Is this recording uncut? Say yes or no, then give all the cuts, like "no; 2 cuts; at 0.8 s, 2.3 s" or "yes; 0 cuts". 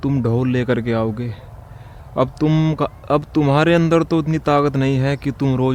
yes; 0 cuts